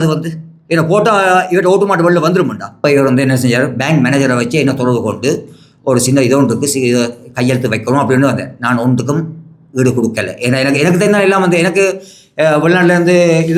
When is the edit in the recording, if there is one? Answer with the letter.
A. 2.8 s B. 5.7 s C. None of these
A